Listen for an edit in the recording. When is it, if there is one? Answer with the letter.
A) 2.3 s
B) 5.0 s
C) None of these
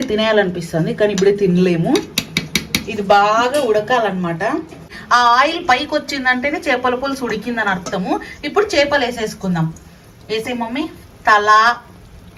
B